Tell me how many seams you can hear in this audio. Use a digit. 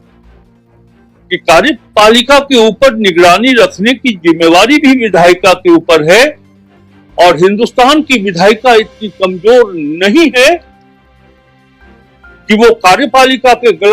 2